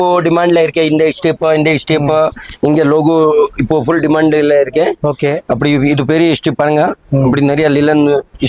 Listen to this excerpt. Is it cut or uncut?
uncut